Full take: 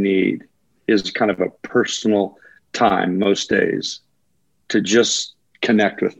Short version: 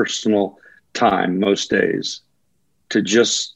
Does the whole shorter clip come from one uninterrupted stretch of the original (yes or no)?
yes